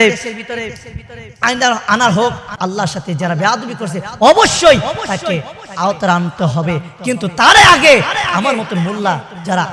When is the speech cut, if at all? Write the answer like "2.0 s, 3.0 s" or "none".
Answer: 2.5 s